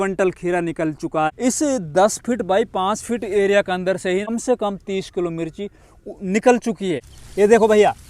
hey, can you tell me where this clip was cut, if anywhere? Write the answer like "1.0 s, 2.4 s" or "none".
1.3 s, 4.3 s, 7.1 s